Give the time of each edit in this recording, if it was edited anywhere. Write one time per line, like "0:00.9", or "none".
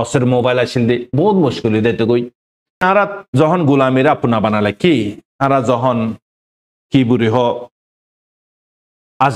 0:02.8